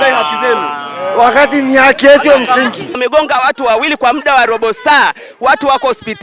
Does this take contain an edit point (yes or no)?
yes